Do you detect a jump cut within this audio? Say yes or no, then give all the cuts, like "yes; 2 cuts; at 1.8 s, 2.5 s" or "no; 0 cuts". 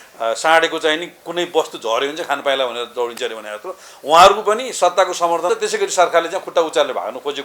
yes; 1 cut; at 5.5 s